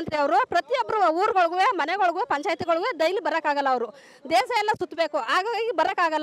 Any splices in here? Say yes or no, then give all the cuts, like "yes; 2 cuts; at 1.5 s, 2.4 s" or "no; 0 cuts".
no; 0 cuts